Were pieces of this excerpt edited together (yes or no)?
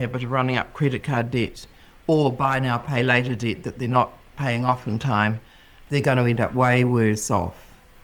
no